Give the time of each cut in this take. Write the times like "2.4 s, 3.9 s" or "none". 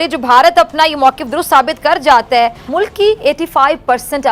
2.6 s